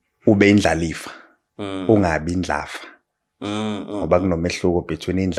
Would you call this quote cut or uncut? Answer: uncut